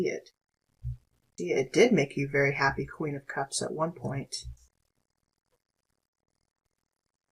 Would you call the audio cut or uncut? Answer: cut